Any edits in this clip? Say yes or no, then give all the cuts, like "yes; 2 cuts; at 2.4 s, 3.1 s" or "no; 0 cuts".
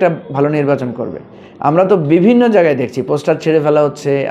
no; 0 cuts